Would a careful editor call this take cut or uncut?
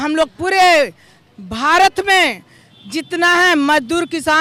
uncut